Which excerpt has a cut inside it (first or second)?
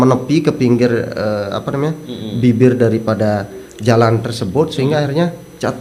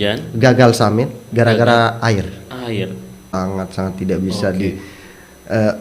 second